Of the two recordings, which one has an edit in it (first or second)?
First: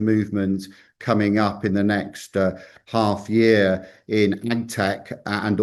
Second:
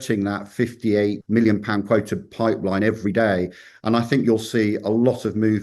second